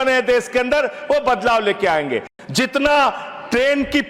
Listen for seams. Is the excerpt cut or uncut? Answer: cut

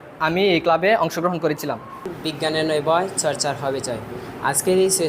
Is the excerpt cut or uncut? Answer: cut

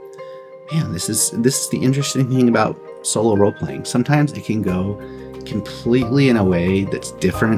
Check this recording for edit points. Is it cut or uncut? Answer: uncut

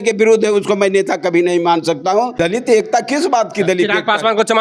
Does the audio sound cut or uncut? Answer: cut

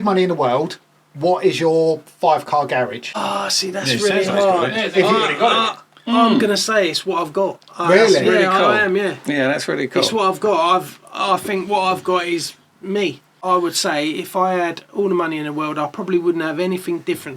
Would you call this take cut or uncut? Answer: cut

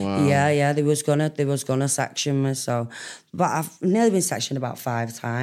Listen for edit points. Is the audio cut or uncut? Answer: uncut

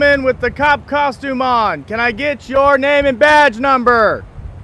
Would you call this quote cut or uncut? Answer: uncut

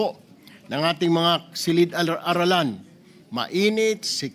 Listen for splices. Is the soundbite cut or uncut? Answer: uncut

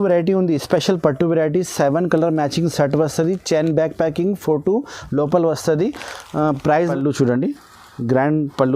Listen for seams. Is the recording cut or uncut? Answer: cut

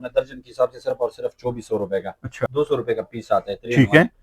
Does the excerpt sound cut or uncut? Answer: cut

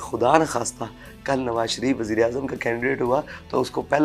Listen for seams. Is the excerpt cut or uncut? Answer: uncut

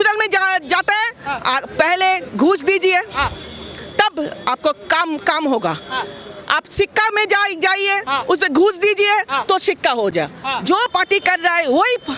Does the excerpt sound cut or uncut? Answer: uncut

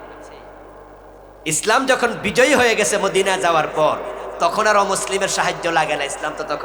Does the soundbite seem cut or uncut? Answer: uncut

